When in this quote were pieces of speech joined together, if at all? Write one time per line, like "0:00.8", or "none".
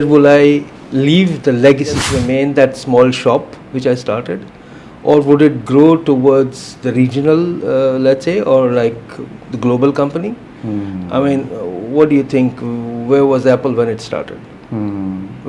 0:02.1